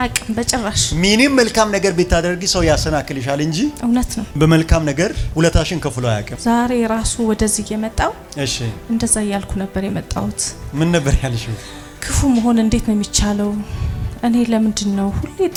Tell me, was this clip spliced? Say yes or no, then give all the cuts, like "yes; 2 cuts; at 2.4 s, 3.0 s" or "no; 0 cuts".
no; 0 cuts